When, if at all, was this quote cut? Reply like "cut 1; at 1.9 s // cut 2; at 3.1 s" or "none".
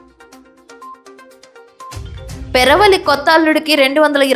cut 1; at 1.8 s